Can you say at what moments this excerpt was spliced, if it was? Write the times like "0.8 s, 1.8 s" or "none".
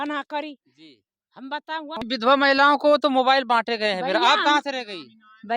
2.0 s